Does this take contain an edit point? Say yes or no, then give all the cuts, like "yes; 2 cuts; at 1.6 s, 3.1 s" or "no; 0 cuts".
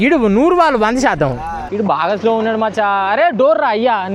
yes; 1 cut; at 1.5 s